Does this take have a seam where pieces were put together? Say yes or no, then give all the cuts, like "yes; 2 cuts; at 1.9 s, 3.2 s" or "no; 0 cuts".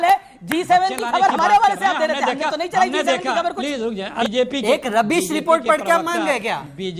yes; 1 cut; at 4.2 s